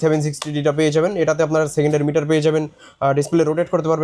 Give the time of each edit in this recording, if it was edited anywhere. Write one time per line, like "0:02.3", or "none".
none